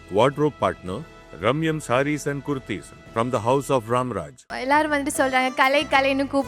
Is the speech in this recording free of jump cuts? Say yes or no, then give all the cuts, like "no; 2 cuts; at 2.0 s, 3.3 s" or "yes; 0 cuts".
no; 1 cut; at 4.5 s